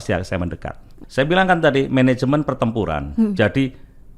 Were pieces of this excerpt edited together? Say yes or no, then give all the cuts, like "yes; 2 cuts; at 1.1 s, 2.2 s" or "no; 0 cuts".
yes; 1 cut; at 1.0 s